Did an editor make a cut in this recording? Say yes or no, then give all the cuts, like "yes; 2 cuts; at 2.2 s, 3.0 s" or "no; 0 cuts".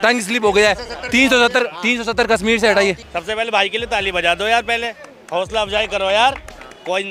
no; 0 cuts